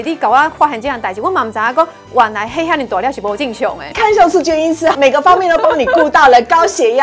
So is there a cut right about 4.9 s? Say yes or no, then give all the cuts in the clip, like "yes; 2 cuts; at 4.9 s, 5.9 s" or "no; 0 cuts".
yes; 2 cuts; at 3.9 s, 4.9 s